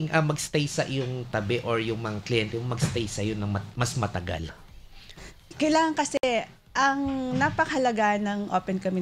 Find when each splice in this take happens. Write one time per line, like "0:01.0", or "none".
none